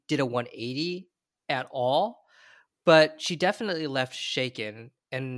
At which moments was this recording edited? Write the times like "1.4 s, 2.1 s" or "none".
none